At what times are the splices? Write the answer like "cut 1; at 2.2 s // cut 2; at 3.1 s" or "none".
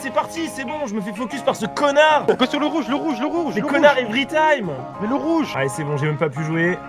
cut 1; at 2.2 s // cut 2; at 5.5 s

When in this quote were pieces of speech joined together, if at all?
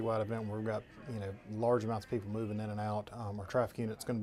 none

